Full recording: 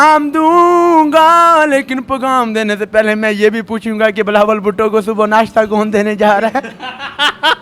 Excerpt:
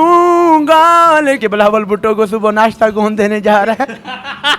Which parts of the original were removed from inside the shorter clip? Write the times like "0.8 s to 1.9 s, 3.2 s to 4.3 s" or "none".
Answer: 1.8 s to 4.1 s